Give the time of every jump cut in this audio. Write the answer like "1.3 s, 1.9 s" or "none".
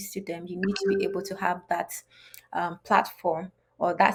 none